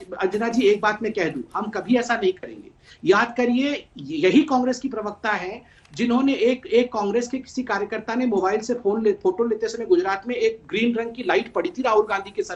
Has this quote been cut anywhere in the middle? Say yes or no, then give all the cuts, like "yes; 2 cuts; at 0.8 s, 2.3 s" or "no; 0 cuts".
no; 0 cuts